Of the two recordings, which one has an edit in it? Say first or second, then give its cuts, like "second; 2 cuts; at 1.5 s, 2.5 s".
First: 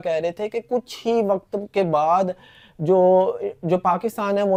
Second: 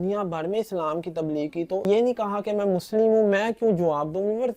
second; 1 cut; at 1.9 s